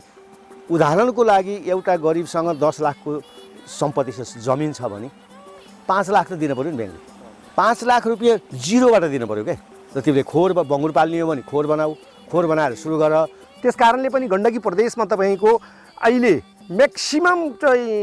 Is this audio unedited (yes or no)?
no